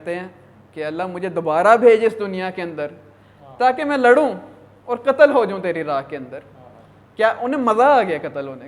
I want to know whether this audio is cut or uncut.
uncut